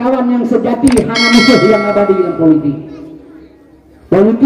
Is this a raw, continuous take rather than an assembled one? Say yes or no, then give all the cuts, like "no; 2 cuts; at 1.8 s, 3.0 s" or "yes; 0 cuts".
yes; 0 cuts